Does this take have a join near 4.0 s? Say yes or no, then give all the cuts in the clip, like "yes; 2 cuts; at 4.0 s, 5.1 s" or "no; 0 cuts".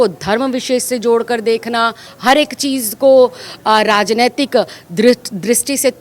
no; 1 cut; at 2.0 s